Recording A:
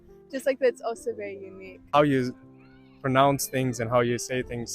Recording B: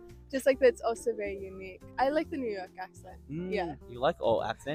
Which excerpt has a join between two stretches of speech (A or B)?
A